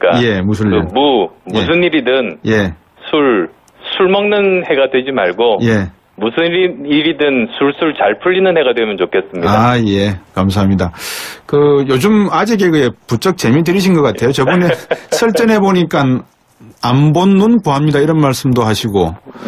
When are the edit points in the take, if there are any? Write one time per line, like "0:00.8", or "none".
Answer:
0:04.8